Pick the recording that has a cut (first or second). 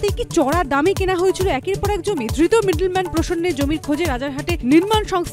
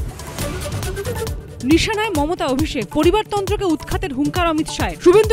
second